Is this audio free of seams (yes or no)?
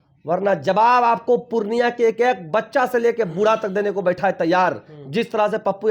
yes